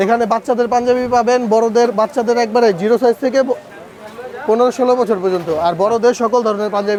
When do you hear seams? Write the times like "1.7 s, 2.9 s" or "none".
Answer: none

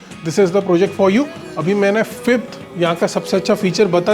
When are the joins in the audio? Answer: 1.4 s

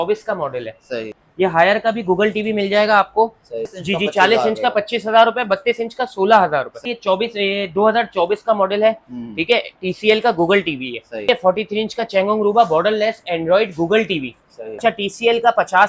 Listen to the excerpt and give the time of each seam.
1.2 s, 3.7 s, 6.8 s, 11.2 s, 14.8 s

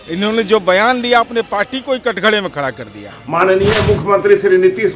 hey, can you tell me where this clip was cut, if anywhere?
3.0 s

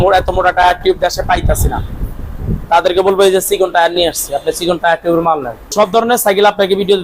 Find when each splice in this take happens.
5.7 s

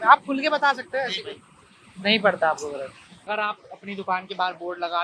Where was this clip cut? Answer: 3.3 s

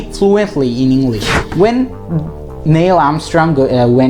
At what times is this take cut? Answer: 1.4 s

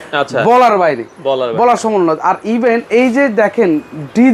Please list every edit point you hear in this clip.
none

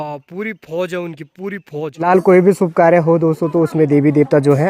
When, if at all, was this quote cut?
2.0 s

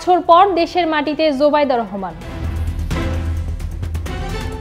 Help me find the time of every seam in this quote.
2.4 s

